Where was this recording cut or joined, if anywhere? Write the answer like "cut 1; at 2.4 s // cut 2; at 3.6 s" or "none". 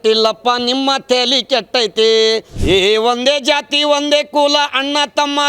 cut 1; at 2.5 s